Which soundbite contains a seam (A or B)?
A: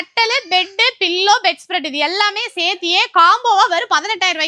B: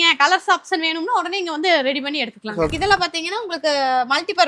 B